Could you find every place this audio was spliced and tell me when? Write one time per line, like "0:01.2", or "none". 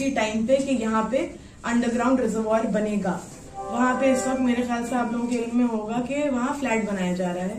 none